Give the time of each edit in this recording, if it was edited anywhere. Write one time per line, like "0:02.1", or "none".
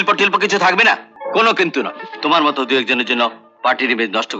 0:01.1